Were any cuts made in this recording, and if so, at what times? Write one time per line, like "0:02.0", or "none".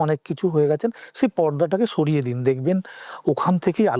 none

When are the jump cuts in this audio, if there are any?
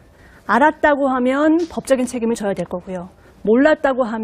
0:01.3

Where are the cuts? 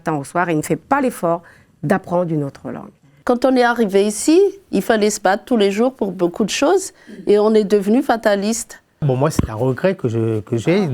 0:03.2
0:09.0

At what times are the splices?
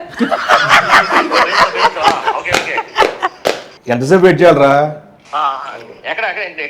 none

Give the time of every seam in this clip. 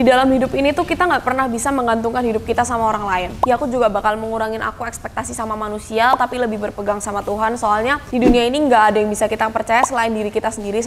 0:03.3
0:08.0

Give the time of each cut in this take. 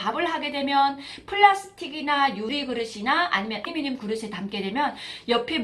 0:02.5
0:03.7

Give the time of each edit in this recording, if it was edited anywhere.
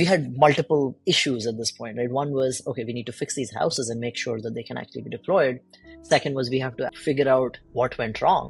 0:01.0
0:06.9
0:07.6

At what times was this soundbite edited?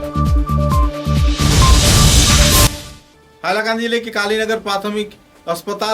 0:02.7

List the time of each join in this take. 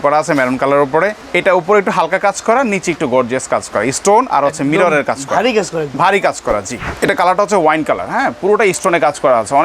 0:01.2
0:06.8

